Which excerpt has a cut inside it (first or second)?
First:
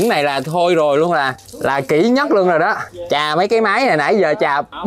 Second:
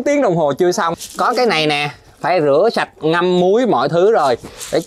second